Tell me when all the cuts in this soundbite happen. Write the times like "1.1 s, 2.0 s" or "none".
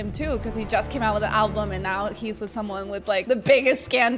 none